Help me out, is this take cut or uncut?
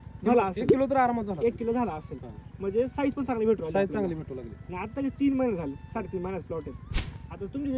uncut